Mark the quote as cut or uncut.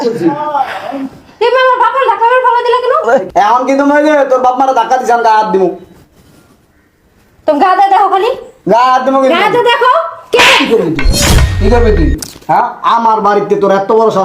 cut